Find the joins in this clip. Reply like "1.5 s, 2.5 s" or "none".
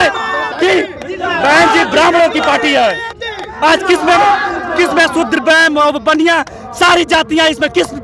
none